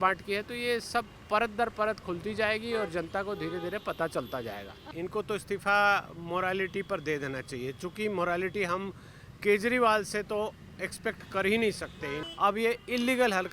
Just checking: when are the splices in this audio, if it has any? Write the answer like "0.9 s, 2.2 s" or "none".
4.9 s, 12.2 s

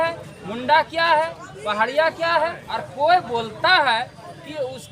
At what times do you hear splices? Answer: 2.8 s

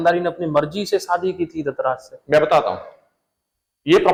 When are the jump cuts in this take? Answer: none

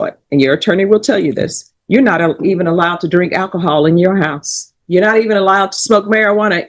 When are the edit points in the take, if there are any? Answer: none

